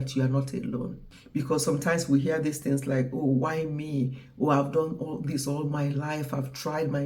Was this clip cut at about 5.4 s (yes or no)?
no